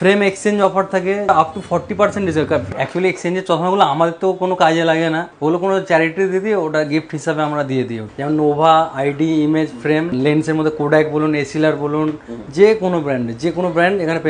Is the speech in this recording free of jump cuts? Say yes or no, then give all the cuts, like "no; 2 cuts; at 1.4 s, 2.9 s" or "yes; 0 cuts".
no; 5 cuts; at 1.3 s, 2.7 s, 5.3 s, 8.1 s, 10.1 s